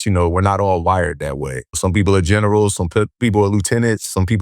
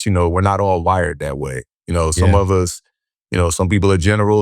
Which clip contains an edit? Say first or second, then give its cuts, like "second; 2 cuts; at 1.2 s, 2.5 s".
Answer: first; 1 cut; at 1.8 s